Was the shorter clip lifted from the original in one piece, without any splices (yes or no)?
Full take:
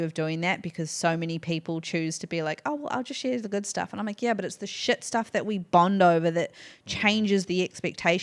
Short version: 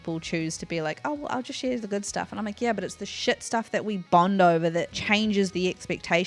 no